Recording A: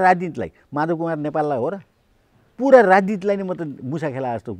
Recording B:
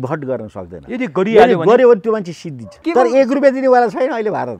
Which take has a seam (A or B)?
B